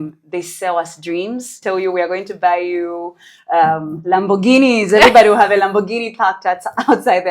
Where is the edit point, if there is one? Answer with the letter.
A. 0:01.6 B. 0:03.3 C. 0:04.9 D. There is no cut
A